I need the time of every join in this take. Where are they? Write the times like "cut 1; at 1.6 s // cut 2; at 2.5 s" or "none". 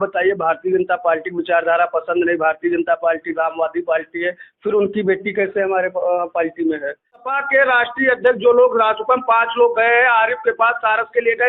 cut 1; at 7.3 s